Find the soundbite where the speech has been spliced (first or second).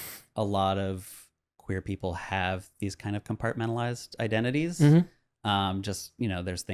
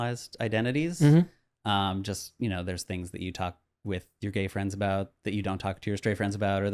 first